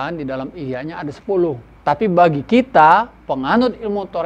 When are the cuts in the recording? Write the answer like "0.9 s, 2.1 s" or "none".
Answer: 1.7 s